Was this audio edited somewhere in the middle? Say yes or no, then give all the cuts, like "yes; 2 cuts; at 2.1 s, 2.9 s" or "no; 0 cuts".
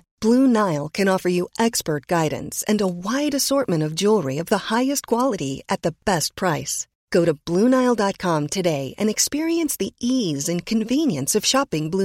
no; 0 cuts